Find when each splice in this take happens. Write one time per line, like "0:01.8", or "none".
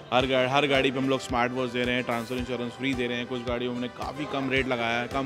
none

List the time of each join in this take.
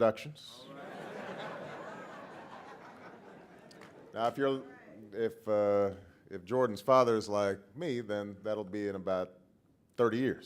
0:01.7

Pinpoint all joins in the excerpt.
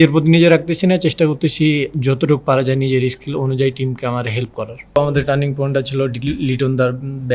0:05.0

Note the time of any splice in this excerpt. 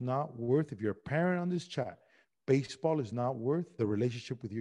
0:03.7

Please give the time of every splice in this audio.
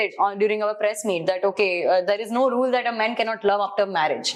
none

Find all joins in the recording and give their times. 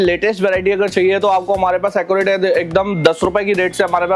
none

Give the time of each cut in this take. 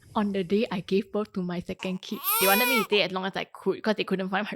0:02.4

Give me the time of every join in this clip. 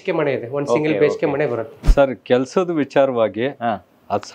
0:01.8

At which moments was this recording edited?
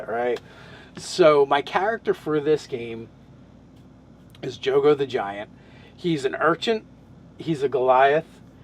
0:05.0

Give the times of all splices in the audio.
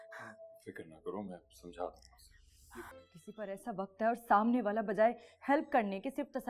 0:03.0

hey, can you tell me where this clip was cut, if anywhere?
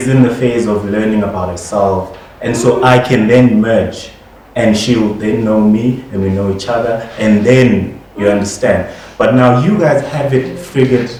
none

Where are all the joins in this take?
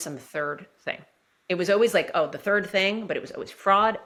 none

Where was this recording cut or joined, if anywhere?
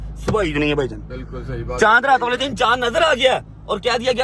none

